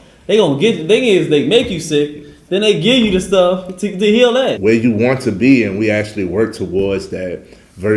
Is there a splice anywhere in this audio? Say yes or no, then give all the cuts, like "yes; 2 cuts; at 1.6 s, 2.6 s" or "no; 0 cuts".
yes; 1 cut; at 4.6 s